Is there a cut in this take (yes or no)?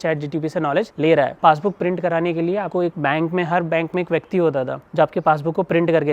yes